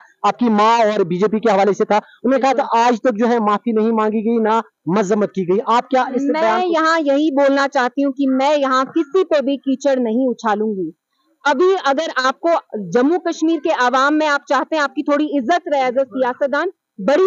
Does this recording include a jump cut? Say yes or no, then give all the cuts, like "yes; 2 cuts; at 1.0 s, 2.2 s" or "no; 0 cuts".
no; 0 cuts